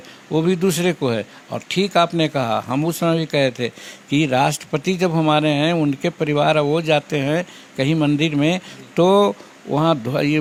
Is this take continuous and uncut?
yes; 0 cuts

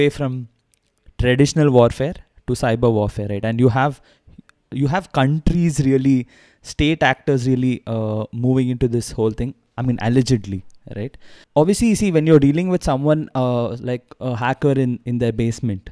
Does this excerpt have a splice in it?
no; 0 cuts

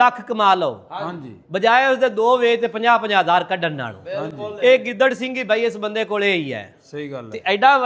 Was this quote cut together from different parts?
no; 0 cuts

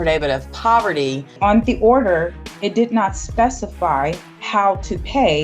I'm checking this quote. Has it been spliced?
yes; 2 cuts; at 1.3 s, 4.3 s

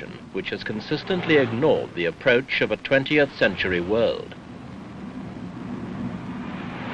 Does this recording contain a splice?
yes; 1 cut; at 3.3 s

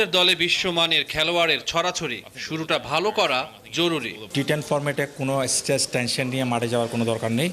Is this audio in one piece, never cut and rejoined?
no; 1 cut; at 4.2 s

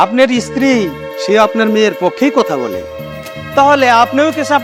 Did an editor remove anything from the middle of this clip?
no; 0 cuts

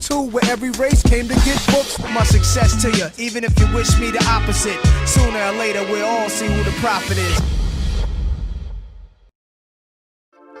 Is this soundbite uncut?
yes; 0 cuts

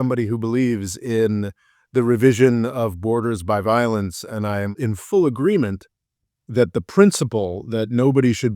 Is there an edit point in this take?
yes; 1 cut; at 4.8 s

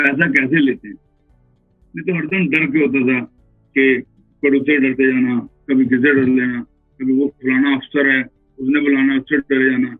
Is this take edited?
no; 0 cuts

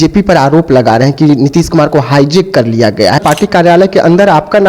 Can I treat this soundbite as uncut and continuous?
no; 1 cut; at 3.2 s

